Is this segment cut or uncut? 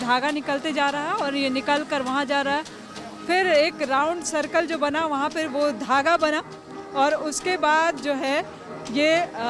uncut